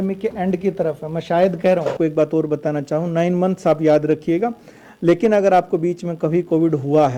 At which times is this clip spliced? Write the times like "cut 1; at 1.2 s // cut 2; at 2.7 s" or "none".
cut 1; at 1.9 s